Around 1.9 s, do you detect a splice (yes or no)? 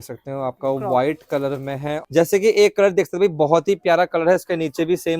yes